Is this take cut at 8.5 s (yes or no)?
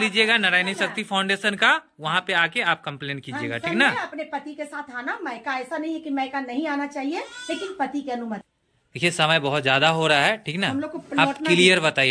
yes